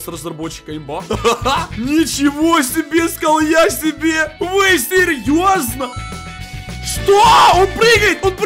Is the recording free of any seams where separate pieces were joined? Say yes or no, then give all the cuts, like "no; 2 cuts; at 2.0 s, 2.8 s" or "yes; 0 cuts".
no; 1 cut; at 1.0 s